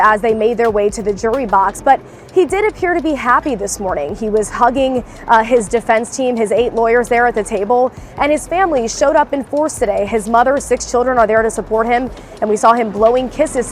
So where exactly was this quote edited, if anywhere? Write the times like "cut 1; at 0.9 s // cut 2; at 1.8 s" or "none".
none

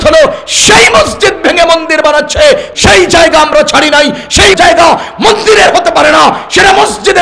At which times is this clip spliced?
cut 1; at 2.7 s

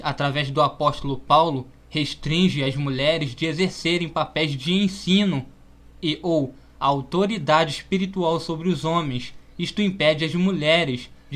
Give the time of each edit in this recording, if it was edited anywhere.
cut 1; at 9.2 s

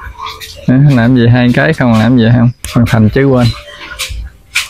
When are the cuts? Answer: cut 1; at 2.6 s

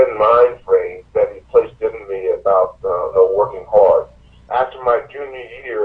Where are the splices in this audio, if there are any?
cut 1; at 1.0 s // cut 2; at 4.4 s

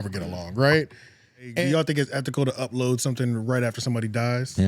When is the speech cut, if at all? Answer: cut 1; at 1.5 s

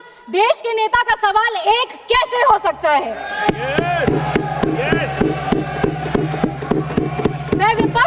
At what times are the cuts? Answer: none

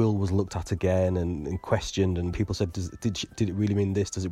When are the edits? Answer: cut 1; at 2.3 s

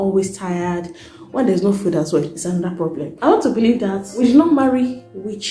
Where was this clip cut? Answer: cut 1; at 1.1 s // cut 2; at 3.1 s // cut 3; at 4.1 s

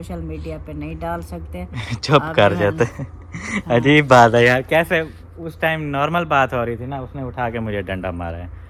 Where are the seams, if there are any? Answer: none

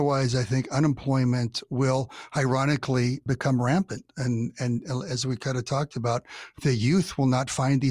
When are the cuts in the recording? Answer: none

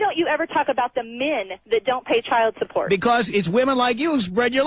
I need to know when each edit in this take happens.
none

